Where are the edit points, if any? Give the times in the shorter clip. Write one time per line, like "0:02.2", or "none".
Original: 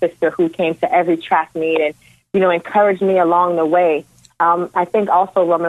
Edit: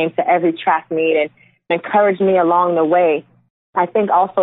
0:01.7
0:03.6